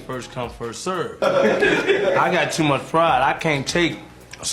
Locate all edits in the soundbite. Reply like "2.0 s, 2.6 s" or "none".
1.2 s